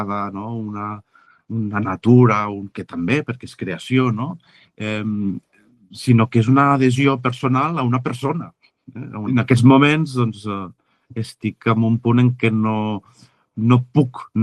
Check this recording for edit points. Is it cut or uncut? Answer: cut